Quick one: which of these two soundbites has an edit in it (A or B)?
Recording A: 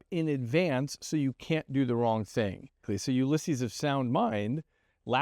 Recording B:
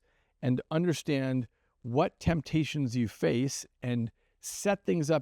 A